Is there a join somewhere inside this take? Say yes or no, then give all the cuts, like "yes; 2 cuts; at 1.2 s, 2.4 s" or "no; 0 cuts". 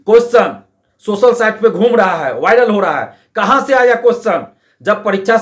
no; 0 cuts